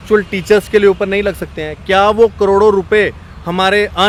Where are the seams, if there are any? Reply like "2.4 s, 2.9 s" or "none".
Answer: none